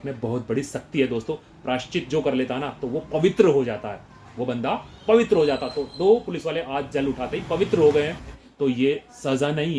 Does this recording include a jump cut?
yes; 1 cut; at 8.3 s

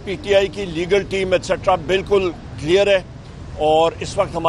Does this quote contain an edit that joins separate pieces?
no; 0 cuts

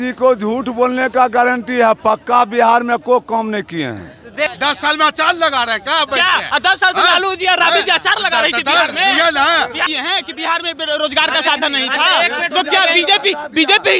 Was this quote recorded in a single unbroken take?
no; 2 cuts; at 4.5 s, 9.9 s

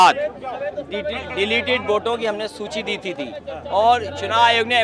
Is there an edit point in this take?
no; 0 cuts

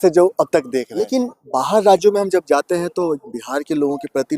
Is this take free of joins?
no; 1 cut; at 1.0 s

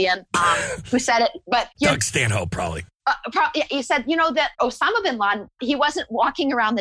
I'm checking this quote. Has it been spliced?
yes; 4 cuts; at 1.7 s, 2.9 s, 4.6 s, 5.6 s

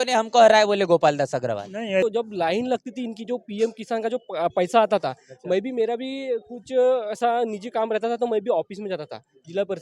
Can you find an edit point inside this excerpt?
yes; 1 cut; at 2.0 s

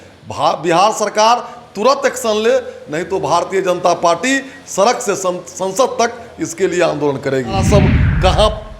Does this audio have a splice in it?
yes; 1 cut; at 7.6 s

